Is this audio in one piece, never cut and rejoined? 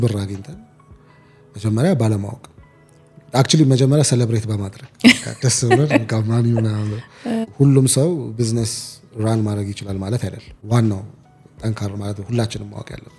no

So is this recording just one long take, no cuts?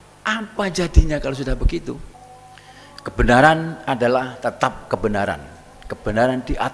no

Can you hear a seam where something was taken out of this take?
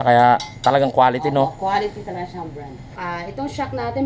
yes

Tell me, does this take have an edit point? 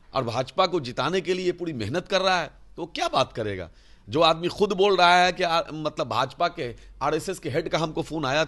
no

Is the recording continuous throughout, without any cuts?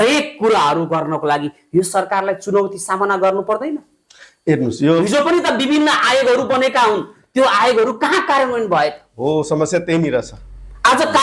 yes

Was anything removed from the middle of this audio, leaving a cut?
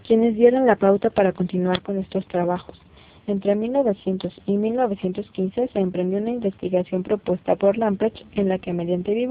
yes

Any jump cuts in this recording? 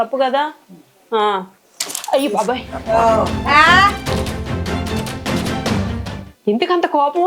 no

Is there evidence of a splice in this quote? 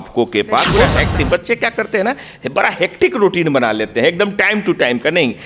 yes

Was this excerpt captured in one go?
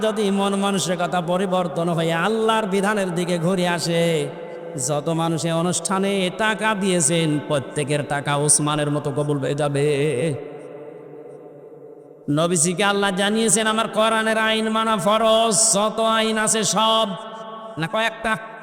yes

